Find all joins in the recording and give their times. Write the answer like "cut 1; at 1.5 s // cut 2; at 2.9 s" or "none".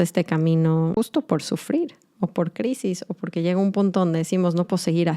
cut 1; at 0.9 s